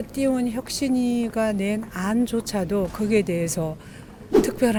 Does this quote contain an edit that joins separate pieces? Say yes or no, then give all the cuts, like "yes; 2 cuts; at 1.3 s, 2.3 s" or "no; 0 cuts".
no; 0 cuts